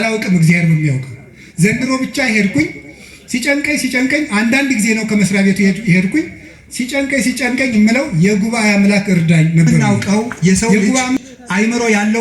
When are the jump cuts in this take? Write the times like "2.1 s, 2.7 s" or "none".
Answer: 9.7 s

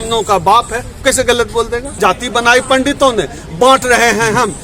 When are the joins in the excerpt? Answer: 1.9 s

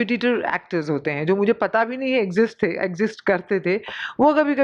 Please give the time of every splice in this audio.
none

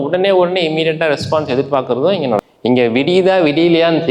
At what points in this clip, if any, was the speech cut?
2.5 s

